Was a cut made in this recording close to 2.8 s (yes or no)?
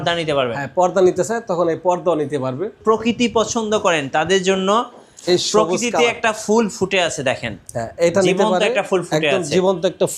yes